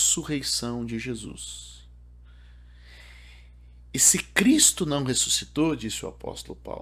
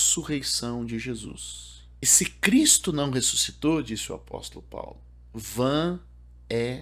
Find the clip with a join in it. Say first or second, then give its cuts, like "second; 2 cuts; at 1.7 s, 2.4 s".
second; 1 cut; at 2.1 s